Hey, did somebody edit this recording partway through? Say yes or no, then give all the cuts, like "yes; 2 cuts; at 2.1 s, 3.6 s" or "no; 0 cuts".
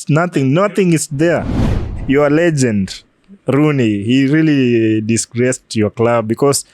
yes; 1 cut; at 1.6 s